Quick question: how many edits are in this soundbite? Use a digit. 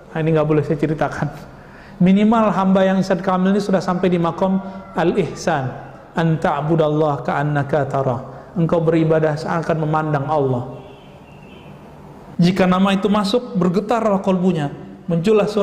1